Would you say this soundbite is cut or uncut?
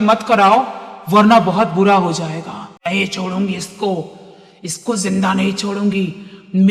cut